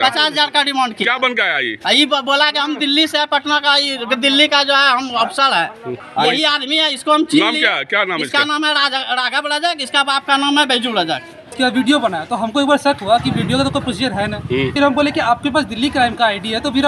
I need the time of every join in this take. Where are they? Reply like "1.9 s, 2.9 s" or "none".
6.0 s, 11.5 s, 14.7 s

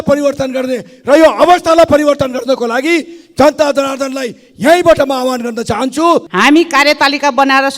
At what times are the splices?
6.3 s

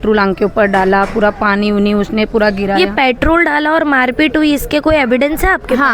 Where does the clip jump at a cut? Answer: none

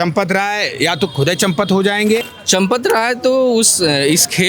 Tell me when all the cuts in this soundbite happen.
2.3 s

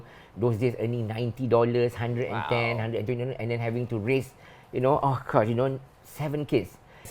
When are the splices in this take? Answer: none

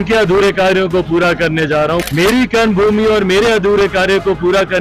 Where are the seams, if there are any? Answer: 2.0 s

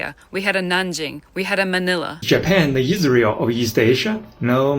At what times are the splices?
2.1 s

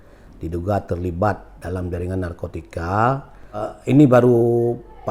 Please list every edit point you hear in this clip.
3.7 s

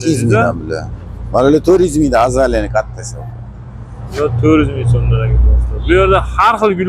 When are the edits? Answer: none

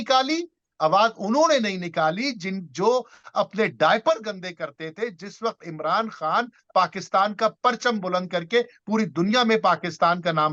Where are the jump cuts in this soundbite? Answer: none

